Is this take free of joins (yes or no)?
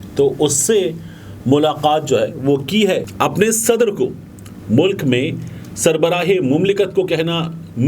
no